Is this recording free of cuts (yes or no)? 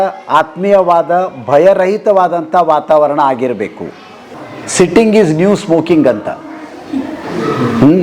no